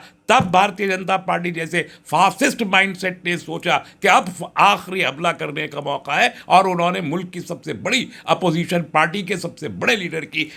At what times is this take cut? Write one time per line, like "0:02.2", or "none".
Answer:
none